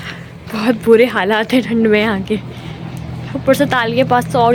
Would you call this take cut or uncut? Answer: uncut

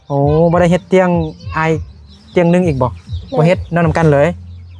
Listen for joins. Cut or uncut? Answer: uncut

